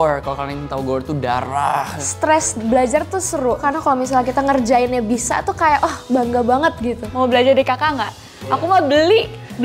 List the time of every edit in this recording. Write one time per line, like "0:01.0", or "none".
0:02.0
0:03.6
0:07.0